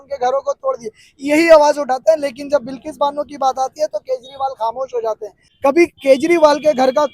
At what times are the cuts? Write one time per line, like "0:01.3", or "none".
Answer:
0:05.4